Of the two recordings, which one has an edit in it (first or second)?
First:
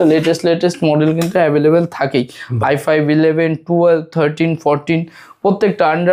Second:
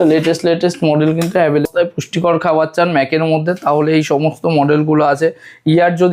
second